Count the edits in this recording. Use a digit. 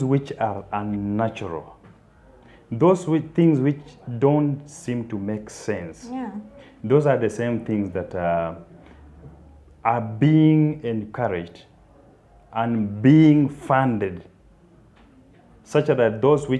0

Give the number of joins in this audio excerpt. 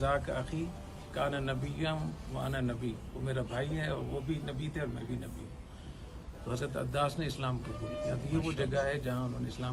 0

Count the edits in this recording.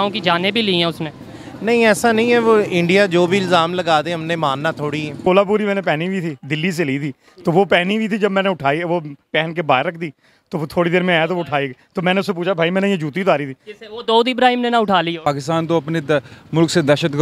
2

